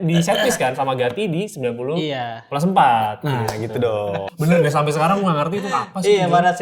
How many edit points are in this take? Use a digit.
1